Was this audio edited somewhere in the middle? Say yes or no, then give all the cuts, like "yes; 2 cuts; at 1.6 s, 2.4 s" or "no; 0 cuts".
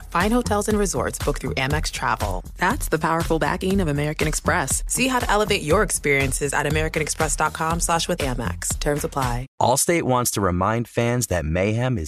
yes; 1 cut; at 9.5 s